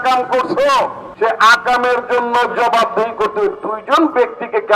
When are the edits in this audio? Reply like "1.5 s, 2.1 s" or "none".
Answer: 1.0 s